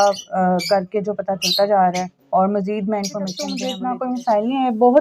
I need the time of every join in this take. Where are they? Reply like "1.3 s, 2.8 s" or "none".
3.6 s